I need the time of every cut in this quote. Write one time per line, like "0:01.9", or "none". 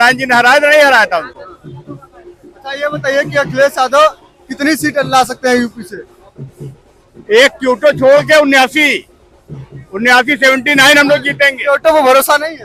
none

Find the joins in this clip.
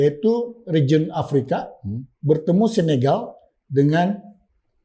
none

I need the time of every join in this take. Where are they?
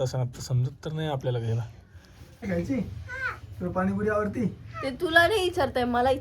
0:02.5

